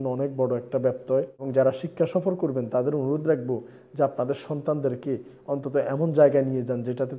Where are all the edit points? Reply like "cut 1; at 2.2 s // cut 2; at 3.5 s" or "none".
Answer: cut 1; at 1.4 s